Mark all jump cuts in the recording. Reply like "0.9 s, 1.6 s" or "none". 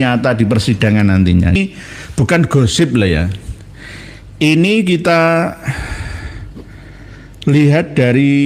1.6 s